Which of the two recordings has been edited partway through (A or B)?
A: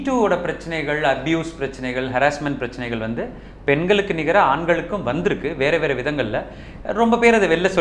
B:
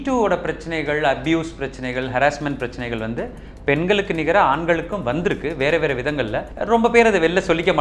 B